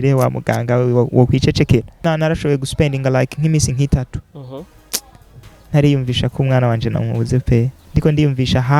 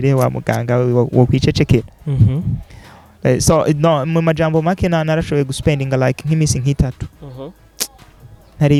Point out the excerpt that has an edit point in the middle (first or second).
first